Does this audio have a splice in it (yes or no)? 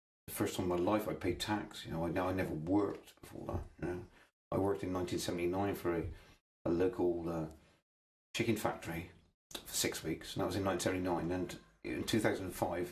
no